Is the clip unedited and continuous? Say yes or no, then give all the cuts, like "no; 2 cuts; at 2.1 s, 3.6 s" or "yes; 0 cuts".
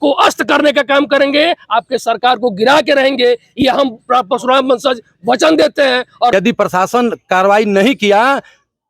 no; 1 cut; at 6.3 s